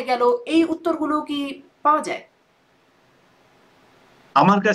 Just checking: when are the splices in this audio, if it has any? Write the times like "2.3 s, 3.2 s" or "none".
none